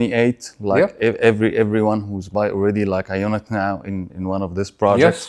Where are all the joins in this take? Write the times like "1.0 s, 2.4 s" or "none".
none